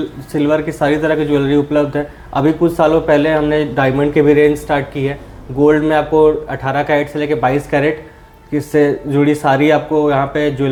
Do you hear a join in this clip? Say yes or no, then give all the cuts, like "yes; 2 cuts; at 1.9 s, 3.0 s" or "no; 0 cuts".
no; 0 cuts